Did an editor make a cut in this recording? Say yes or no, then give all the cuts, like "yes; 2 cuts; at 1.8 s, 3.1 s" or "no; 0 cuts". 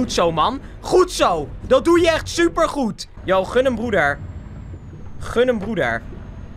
no; 0 cuts